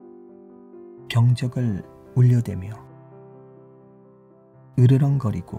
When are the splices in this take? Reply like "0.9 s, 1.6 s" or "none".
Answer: none